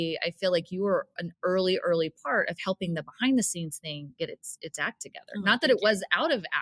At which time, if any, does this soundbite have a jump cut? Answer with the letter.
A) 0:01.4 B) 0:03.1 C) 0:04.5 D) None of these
D